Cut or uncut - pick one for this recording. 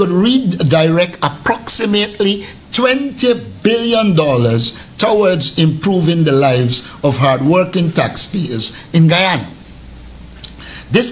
uncut